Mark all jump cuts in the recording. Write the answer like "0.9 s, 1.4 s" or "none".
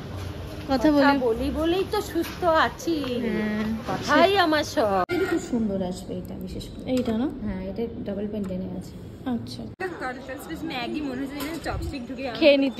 5.1 s, 9.8 s